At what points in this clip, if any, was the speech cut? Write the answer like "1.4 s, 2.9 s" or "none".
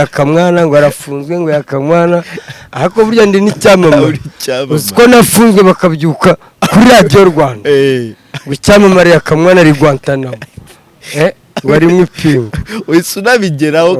none